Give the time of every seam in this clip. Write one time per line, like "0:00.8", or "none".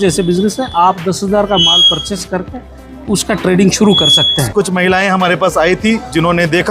0:04.5